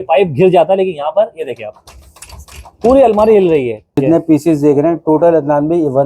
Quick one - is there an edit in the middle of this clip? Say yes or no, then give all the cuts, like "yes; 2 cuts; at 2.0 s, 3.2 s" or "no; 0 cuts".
yes; 1 cut; at 4.0 s